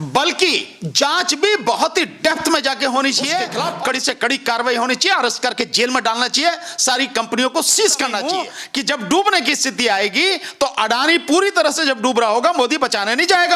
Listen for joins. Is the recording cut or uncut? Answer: cut